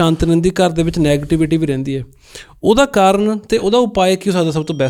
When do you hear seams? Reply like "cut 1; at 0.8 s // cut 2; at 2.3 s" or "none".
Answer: none